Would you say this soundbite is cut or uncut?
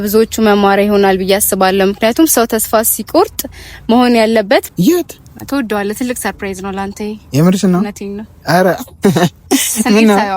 cut